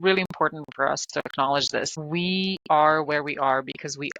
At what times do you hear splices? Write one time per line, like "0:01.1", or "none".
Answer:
0:02.0

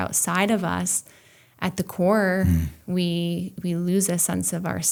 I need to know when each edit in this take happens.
none

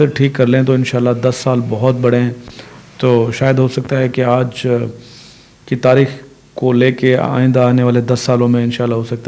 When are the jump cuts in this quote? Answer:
none

